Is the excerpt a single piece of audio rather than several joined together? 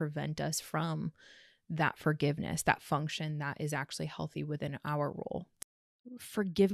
no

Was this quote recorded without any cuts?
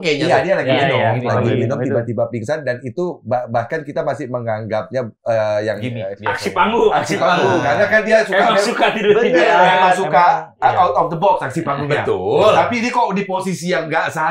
yes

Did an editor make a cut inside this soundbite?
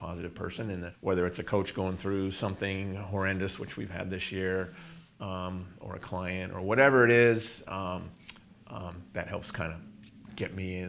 yes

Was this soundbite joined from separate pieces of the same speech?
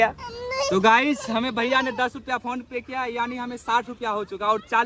no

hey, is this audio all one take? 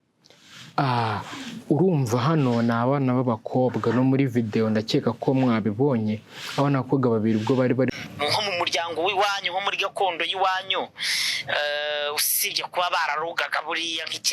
no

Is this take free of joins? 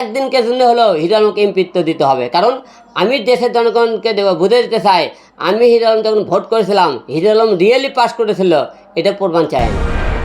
yes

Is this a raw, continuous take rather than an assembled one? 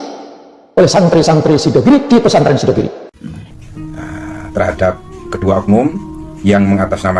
no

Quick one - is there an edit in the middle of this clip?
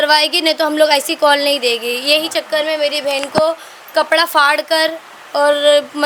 no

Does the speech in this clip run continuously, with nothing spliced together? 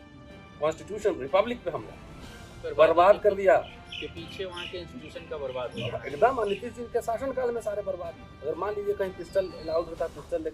no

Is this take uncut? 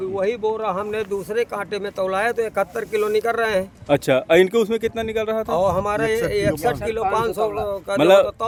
yes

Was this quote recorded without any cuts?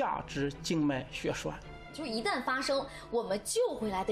no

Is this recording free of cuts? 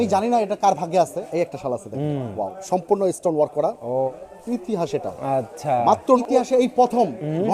no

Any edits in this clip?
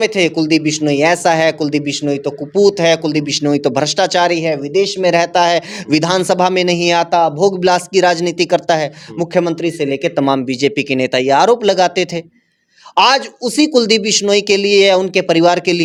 no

